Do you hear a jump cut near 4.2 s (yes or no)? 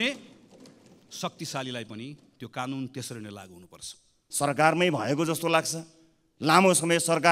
yes